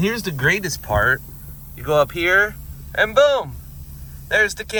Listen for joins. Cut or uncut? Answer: uncut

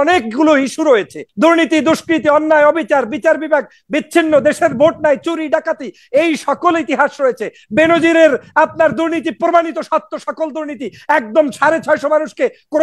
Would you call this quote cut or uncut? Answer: cut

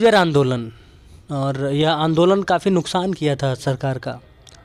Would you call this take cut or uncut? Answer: uncut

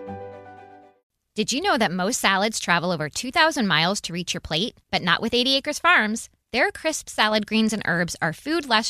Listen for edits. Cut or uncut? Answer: cut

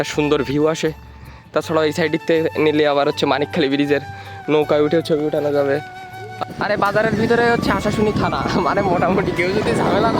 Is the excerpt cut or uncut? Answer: cut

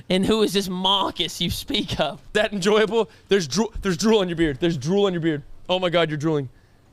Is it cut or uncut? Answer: cut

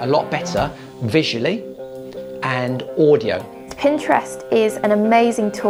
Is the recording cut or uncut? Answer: cut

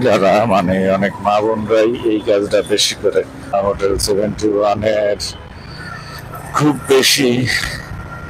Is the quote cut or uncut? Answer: cut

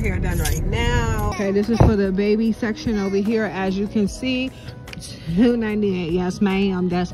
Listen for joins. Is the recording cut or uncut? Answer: cut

